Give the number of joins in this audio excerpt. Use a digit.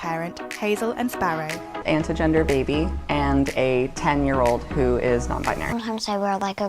2